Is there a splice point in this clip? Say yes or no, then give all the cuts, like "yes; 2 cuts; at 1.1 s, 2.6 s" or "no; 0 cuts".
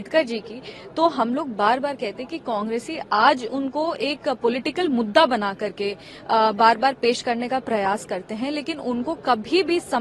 no; 0 cuts